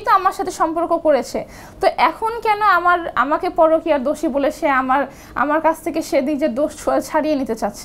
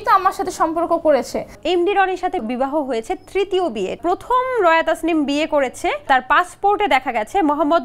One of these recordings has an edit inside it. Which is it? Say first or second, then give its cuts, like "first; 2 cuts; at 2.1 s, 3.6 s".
second; 4 cuts; at 1.5 s, 2.4 s, 4.0 s, 6.1 s